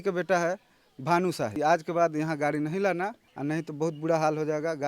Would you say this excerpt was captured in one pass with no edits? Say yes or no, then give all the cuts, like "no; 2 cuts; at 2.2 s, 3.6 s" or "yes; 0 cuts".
no; 2 cuts; at 1.5 s, 3.3 s